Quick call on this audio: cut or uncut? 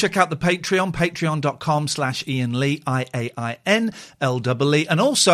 uncut